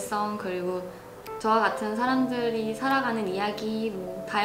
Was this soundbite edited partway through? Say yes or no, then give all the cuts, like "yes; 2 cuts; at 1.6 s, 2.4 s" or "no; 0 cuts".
yes; 1 cut; at 1.2 s